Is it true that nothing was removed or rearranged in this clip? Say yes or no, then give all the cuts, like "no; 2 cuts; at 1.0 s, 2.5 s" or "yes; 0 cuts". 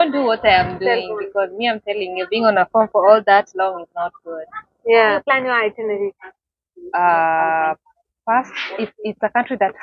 no; 1 cut; at 5.2 s